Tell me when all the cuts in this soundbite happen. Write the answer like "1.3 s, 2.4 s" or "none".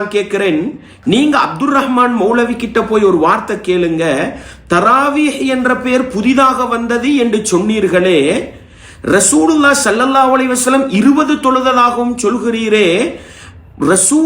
none